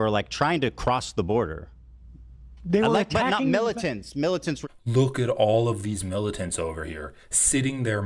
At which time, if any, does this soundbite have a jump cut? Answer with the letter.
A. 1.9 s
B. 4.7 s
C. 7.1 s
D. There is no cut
B